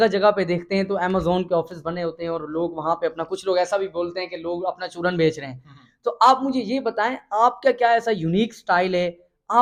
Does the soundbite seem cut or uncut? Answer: uncut